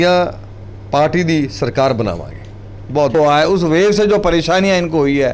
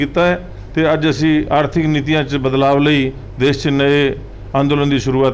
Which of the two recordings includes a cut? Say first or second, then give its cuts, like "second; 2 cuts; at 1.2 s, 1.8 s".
first; 1 cut; at 3.1 s